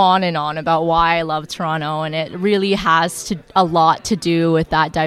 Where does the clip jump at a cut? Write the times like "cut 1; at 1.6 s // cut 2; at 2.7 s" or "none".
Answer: none